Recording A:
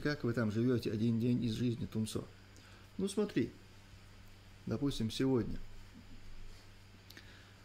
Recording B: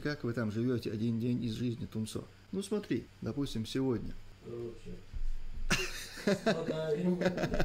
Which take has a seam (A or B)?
B